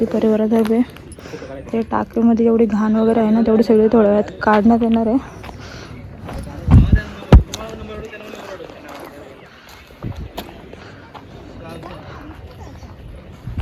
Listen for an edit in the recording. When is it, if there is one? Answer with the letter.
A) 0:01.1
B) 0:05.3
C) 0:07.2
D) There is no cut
D